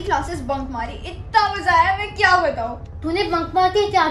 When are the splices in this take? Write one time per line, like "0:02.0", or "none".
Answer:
none